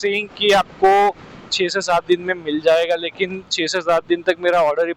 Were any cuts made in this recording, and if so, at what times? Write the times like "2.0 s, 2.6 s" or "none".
none